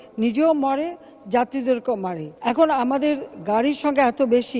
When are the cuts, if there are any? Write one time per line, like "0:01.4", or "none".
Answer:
0:02.3